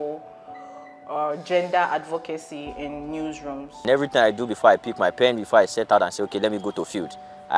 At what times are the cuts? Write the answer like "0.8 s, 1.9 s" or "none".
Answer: 3.7 s